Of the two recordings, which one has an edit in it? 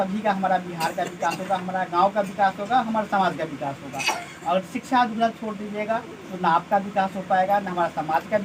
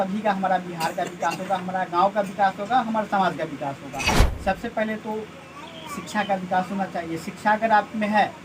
second; 1 cut; at 4.3 s

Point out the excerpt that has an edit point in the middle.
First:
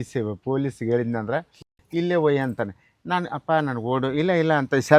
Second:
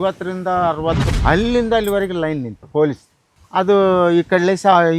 second; 2 cuts; at 1.1 s, 2.6 s

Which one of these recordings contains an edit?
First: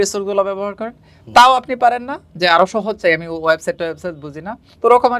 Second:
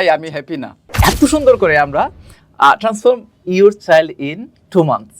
second; 1 cut; at 1.0 s

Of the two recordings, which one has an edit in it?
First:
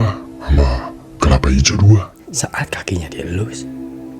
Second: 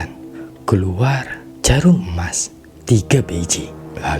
first; 1 cut; at 2.1 s

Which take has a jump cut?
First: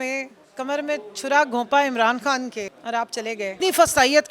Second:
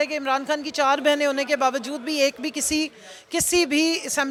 first; 2 cuts; at 2.8 s, 3.5 s

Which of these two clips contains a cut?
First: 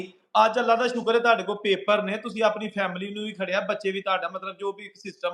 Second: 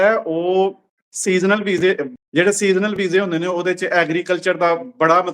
second; 1 cut; at 2.1 s

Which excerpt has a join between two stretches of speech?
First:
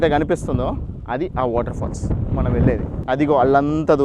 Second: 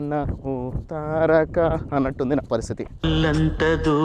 first; 1 cut; at 2.9 s

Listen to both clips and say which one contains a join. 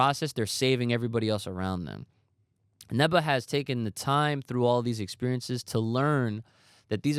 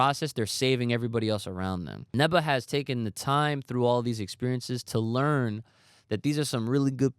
second; 1 cut; at 2.0 s

